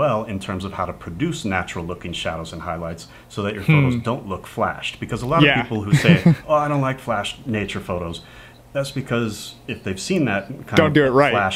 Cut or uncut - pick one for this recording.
uncut